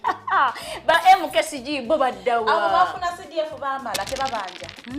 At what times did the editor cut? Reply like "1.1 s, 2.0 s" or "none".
0.9 s